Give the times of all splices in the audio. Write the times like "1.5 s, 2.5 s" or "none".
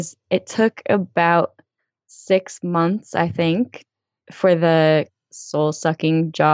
3.9 s, 5.1 s